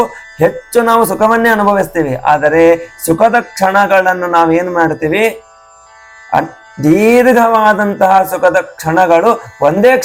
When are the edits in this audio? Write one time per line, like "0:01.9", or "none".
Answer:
none